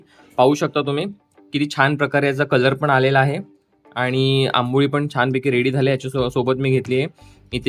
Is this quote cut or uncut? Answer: uncut